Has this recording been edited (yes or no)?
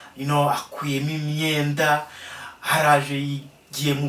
no